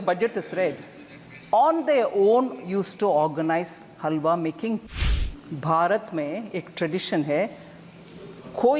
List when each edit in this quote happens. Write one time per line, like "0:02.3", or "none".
0:05.0

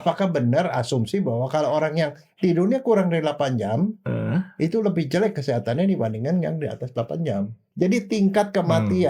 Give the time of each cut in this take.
0:07.6

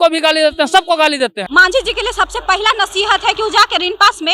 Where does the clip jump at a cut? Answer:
0:01.4

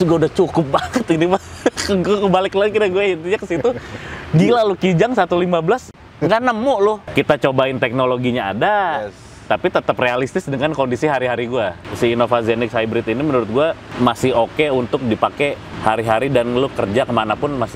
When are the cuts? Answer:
0:07.1
0:11.8
0:13.9
0:15.7

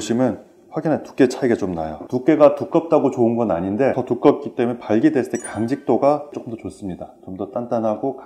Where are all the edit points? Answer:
0:06.5

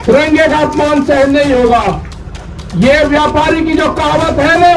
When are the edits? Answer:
none

